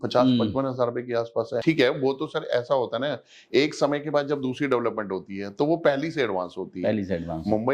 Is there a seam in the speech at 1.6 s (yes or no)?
yes